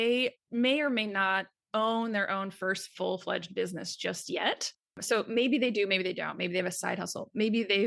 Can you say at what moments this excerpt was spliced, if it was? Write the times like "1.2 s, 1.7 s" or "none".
4.9 s

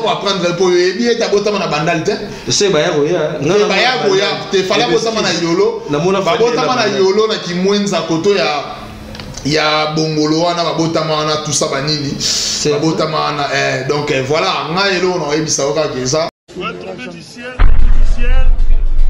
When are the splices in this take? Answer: 16.4 s

